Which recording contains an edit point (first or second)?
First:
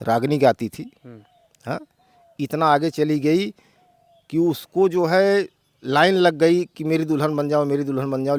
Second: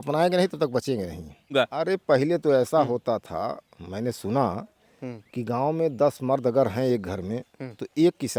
second